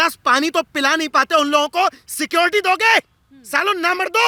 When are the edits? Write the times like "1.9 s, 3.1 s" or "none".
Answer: none